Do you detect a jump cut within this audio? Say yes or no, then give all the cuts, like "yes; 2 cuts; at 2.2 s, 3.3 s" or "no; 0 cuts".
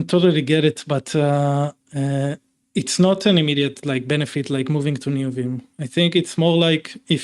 no; 0 cuts